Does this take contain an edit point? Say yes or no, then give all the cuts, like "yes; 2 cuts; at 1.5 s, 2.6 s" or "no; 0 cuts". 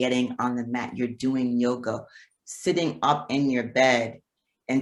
no; 0 cuts